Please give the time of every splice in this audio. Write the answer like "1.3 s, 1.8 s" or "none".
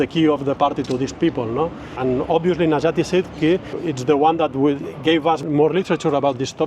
1.9 s, 3.7 s, 5.4 s